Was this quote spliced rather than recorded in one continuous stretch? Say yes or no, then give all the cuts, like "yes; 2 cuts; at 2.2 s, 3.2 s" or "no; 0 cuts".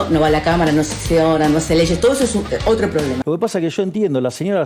yes; 1 cut; at 3.2 s